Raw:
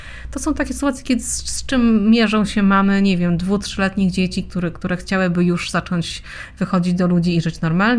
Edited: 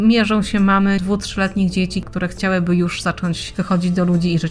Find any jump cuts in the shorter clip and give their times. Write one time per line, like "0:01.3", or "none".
0:01.0
0:02.1
0:03.5